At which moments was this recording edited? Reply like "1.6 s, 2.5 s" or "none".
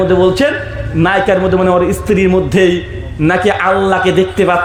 none